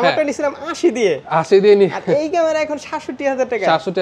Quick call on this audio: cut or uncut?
uncut